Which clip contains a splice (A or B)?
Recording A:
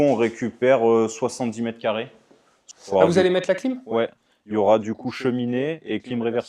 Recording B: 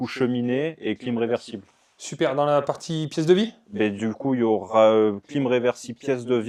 A